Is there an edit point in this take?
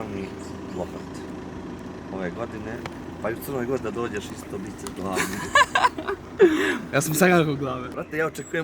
no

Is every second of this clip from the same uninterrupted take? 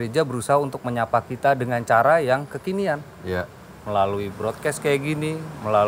yes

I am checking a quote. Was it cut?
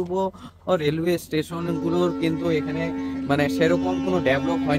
no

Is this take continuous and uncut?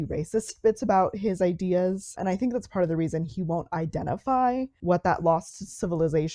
no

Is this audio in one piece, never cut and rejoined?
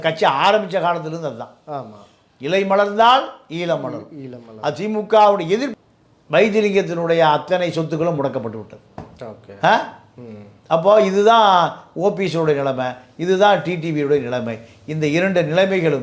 no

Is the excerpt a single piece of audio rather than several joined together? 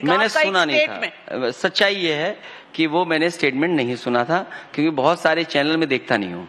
yes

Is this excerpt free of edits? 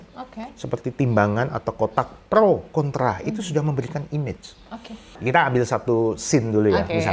no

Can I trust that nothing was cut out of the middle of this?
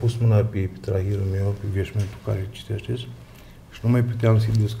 yes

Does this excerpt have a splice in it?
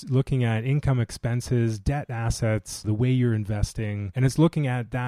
yes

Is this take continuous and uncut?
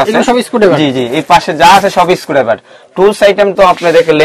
yes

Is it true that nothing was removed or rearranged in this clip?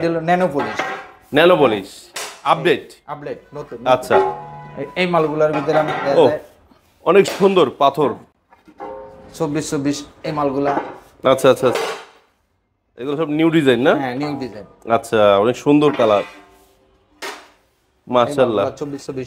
yes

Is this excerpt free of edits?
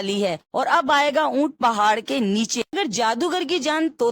no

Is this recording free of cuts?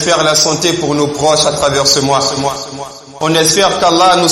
yes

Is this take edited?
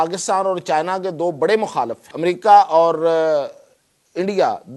yes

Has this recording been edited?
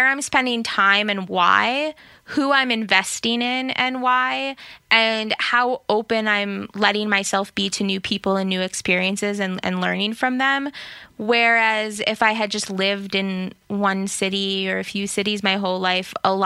no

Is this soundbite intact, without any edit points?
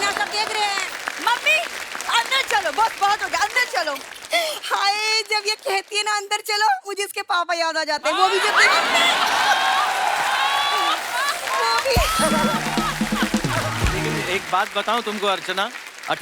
no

